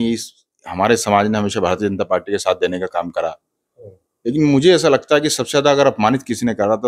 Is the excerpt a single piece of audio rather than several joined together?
yes; 0 cuts

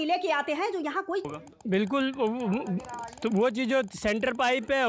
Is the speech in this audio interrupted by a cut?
yes; 1 cut; at 1.3 s

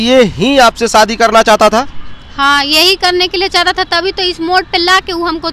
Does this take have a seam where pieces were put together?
no; 0 cuts

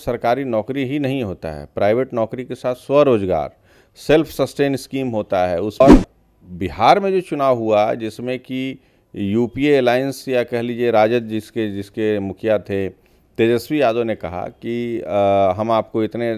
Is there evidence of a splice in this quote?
yes; 1 cut; at 5.8 s

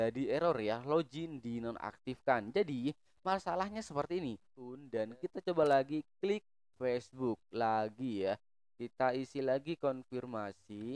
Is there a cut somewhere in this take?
yes; 1 cut; at 4.9 s

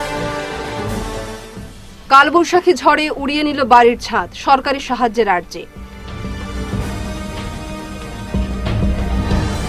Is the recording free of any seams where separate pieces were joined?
no; 1 cut; at 1.0 s

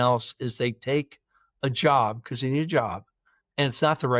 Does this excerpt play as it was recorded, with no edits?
yes; 0 cuts

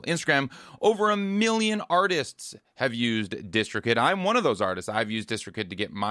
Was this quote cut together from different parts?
no; 0 cuts

